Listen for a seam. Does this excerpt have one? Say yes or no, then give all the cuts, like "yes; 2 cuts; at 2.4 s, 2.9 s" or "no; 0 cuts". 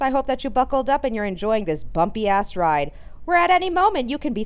no; 0 cuts